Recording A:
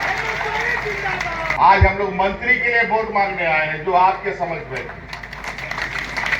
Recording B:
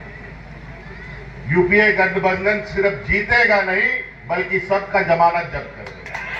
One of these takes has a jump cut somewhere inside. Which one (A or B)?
A